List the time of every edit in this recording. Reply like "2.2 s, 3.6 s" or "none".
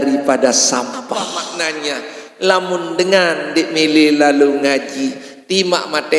1.3 s